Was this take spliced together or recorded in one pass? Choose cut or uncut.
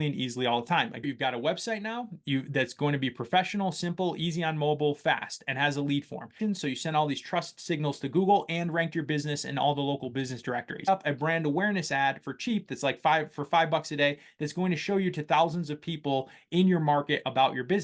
cut